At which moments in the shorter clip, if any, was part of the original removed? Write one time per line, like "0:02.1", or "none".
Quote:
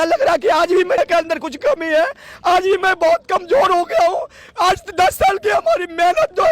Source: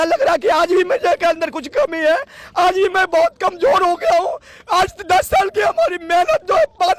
0:01.0